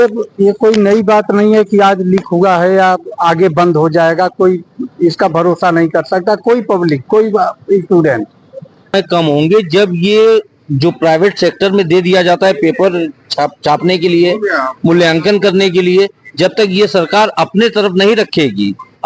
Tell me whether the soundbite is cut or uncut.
cut